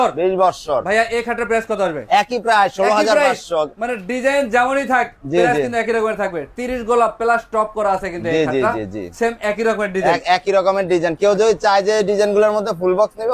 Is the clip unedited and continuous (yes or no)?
yes